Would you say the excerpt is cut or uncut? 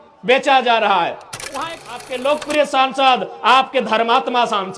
cut